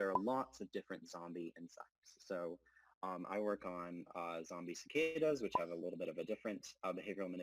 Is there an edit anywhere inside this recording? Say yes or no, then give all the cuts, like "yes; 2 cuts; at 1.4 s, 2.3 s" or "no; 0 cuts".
no; 0 cuts